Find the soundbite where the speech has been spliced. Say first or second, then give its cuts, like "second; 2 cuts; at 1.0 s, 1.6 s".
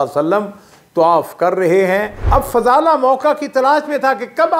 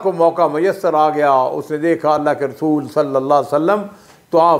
first; 1 cut; at 2.2 s